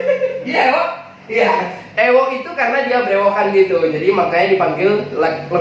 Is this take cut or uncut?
uncut